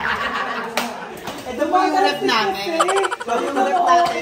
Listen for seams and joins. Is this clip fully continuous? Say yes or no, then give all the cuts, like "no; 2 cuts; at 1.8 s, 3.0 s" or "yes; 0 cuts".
no; 1 cut; at 1.5 s